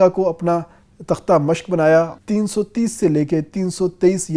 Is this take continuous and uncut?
no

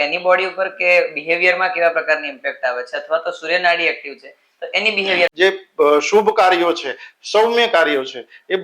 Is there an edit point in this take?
yes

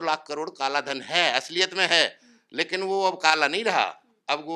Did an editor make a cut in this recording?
no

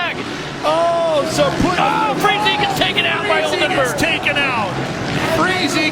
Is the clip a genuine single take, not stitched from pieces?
yes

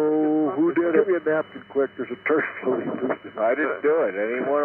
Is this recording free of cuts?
no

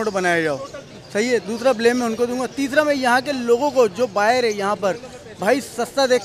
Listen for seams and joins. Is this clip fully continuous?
yes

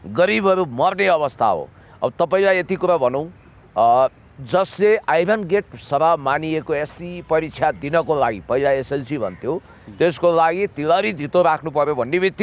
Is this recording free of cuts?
yes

